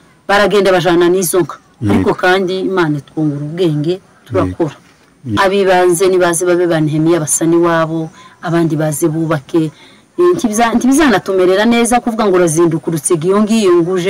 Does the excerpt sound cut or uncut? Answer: cut